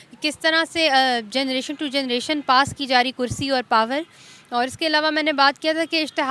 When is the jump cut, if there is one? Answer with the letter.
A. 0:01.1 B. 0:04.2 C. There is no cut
C